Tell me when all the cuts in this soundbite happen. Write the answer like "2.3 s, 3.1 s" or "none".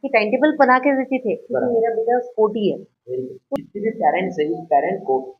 3.4 s